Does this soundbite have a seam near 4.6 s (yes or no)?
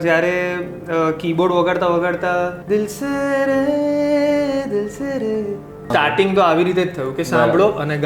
no